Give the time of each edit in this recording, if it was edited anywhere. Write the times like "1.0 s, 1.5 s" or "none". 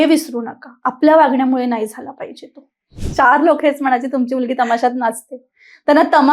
3.0 s